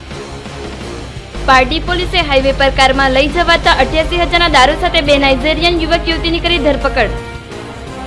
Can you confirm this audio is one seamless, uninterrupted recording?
no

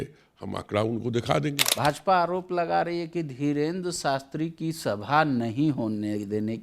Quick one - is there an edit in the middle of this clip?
yes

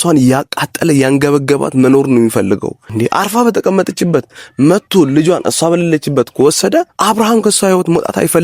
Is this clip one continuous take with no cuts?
no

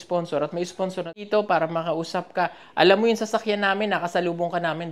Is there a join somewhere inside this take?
yes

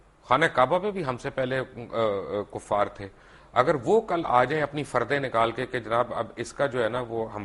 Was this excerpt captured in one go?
yes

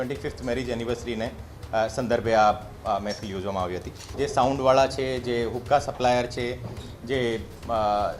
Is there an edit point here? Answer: yes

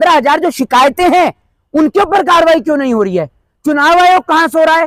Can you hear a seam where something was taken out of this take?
no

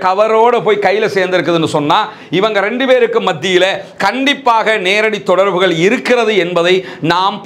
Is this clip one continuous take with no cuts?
yes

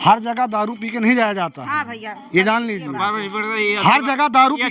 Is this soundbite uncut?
yes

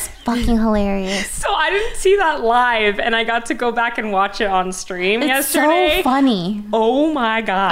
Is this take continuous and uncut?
yes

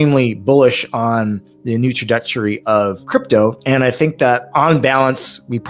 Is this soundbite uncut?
no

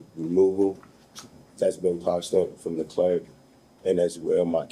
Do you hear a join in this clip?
no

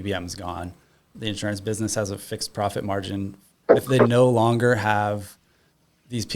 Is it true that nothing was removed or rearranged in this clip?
no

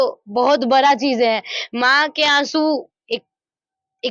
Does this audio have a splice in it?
no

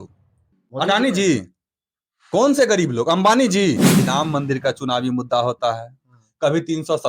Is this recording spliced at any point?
yes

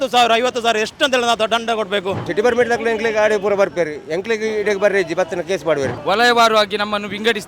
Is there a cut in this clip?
yes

